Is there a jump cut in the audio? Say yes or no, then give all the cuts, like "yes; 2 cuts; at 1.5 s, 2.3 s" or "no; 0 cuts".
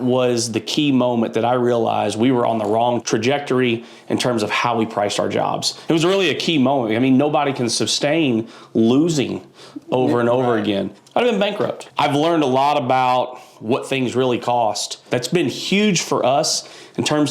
yes; 4 cuts; at 3.0 s, 10.9 s, 11.8 s, 15.0 s